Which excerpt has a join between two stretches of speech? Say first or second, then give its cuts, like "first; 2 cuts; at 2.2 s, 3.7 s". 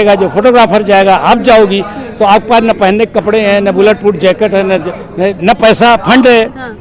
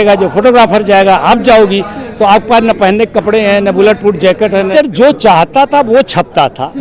second; 1 cut; at 4.7 s